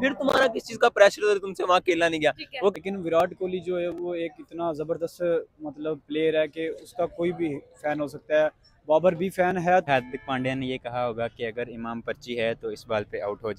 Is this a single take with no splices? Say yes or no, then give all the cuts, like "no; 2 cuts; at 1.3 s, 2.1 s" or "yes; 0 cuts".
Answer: no; 2 cuts; at 2.7 s, 9.9 s